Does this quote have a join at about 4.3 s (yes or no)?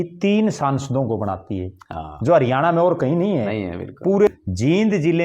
yes